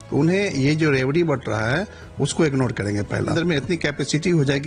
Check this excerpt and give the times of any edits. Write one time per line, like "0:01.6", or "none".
0:03.3